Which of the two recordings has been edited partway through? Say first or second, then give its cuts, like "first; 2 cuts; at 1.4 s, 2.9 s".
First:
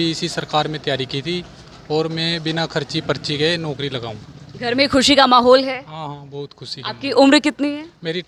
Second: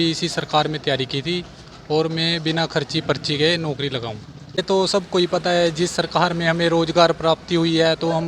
second; 1 cut; at 4.6 s